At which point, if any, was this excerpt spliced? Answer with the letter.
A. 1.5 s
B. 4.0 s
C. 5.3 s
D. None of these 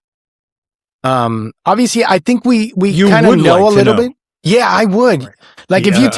C